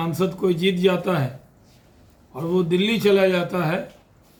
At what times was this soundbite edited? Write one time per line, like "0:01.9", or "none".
none

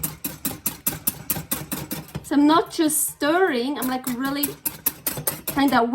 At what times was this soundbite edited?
0:05.0

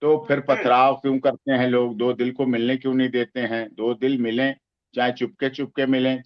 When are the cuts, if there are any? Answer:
none

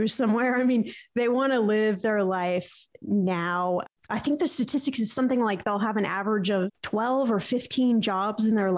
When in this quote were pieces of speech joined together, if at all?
0:04.0

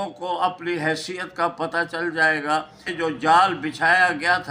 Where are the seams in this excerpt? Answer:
0:02.8

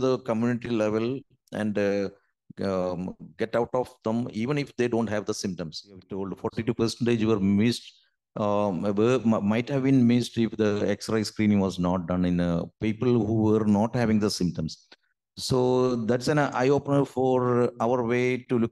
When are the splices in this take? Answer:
0:06.2

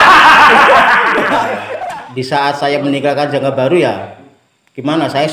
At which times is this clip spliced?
0:01.6

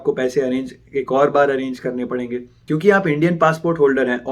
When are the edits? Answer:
0:02.6

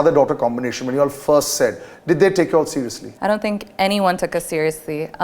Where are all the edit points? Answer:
0:03.0

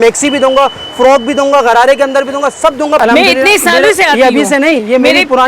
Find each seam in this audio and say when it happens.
0:03.0

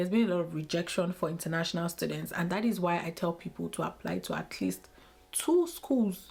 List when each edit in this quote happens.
none

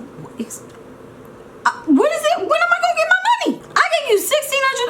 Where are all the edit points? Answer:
0:03.7

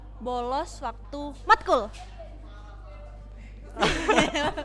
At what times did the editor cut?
none

